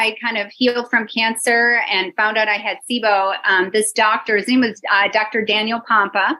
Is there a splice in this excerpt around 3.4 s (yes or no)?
no